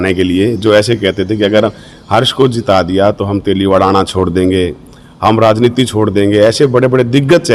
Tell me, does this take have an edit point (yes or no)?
no